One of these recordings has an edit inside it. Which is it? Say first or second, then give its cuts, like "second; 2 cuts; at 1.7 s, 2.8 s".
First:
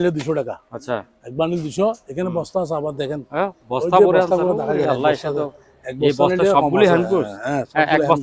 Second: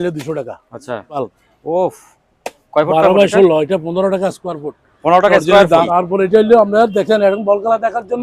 second; 2 cuts; at 1.2 s, 5.9 s